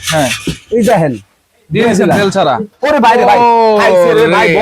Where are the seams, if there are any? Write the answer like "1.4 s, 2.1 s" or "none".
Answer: 2.7 s